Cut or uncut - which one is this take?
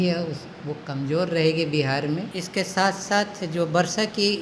cut